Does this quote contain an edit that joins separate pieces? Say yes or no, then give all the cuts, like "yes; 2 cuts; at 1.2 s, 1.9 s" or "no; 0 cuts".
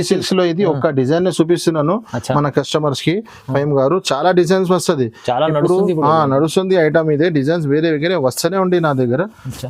no; 0 cuts